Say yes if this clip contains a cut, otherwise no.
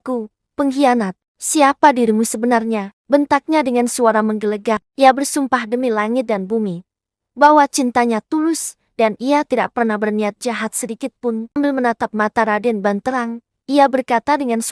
yes